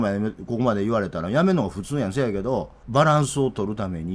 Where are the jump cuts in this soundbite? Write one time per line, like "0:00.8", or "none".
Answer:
0:02.8